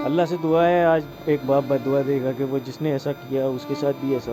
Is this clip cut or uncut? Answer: uncut